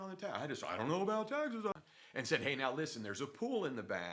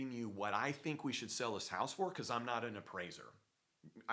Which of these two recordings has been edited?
first; 1 cut; at 1.7 s

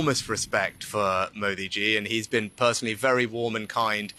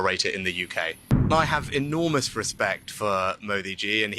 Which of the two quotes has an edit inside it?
second; 1 cut; at 1.2 s

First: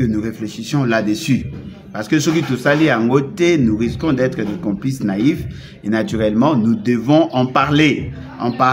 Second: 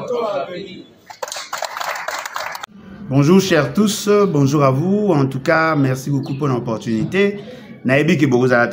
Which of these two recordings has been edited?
second; 1 cut; at 2.6 s

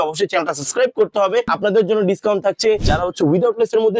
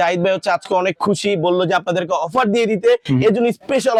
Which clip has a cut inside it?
first; 2 cuts; at 1.5 s, 2.9 s

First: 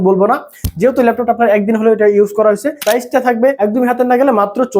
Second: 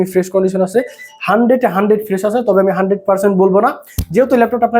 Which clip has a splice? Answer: first; 2 cuts; at 2.7 s, 3.6 s

